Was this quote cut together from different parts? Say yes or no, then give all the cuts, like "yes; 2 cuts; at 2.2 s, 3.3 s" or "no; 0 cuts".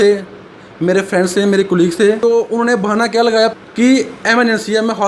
yes; 2 cuts; at 2.2 s, 3.5 s